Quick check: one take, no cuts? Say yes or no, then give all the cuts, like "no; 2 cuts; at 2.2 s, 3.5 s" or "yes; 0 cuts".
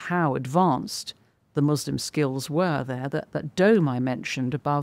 yes; 0 cuts